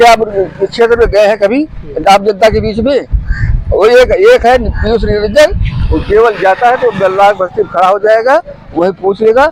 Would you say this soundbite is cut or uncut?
uncut